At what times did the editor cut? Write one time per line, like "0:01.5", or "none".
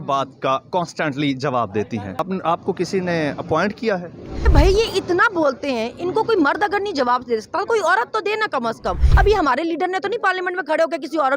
0:02.2
0:04.5
0:09.0